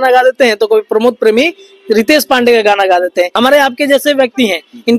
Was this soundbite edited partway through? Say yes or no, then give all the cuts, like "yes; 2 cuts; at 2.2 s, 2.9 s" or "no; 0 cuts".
yes; 1 cut; at 3.3 s